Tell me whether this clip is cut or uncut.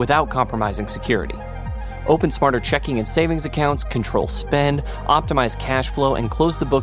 uncut